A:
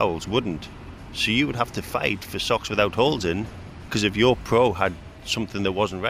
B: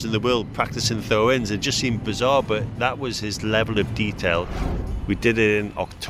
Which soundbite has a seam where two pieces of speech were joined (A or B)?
B